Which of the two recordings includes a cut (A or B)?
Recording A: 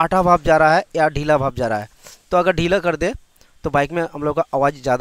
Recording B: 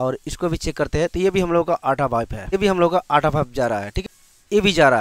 B